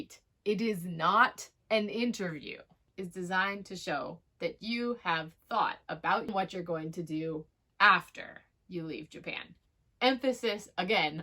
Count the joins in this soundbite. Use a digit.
2